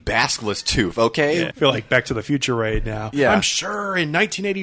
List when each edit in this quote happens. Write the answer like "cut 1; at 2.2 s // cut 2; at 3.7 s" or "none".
cut 1; at 1.5 s